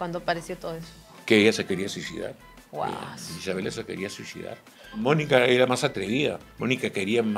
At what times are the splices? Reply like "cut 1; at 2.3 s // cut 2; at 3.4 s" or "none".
cut 1; at 5.0 s // cut 2; at 6.5 s

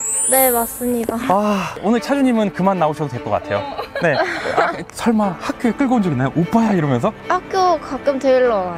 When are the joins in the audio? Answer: cut 1; at 1.7 s // cut 2; at 4.8 s

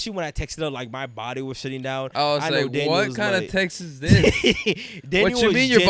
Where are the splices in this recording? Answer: none

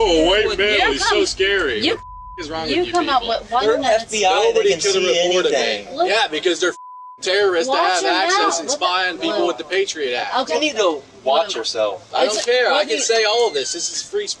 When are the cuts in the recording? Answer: cut 1; at 3.6 s // cut 2; at 6.1 s // cut 3; at 10.5 s

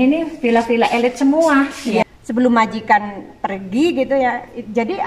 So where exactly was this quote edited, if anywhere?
cut 1; at 2.0 s

